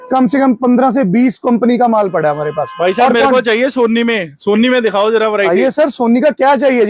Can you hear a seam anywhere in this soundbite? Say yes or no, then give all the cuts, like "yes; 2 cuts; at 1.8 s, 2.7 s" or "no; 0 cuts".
no; 0 cuts